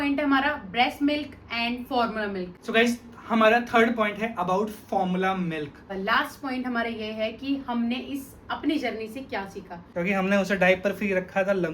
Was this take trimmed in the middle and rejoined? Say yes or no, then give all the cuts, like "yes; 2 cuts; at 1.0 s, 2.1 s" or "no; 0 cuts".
yes; 3 cuts; at 2.5 s, 5.9 s, 9.8 s